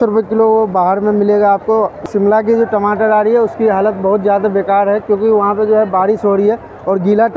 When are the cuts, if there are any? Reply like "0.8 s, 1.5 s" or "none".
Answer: 2.1 s